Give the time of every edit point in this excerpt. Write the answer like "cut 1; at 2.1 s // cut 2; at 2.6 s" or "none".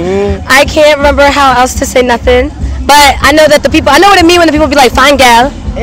none